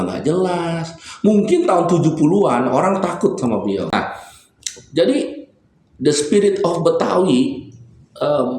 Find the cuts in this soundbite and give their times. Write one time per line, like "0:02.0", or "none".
0:03.9